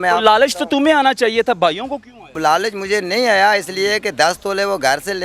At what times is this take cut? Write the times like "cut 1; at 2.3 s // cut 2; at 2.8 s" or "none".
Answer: cut 1; at 2.3 s